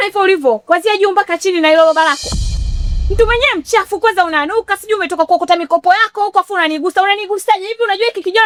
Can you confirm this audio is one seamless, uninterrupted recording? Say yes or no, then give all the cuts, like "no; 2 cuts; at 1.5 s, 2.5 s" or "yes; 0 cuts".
yes; 0 cuts